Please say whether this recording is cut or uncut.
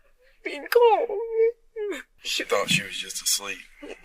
cut